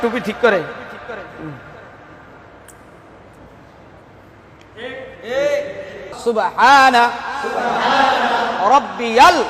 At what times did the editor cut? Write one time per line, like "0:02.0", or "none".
0:06.2